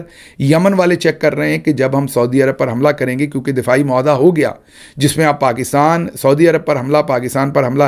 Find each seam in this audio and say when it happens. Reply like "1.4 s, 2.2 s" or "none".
none